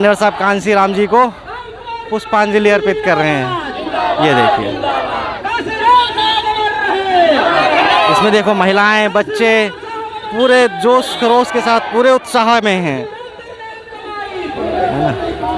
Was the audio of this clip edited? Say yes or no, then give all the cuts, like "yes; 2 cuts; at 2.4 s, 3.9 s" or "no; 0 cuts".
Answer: no; 0 cuts